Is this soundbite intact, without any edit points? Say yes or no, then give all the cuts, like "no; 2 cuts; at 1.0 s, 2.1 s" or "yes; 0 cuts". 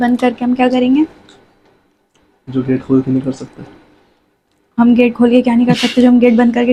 yes; 0 cuts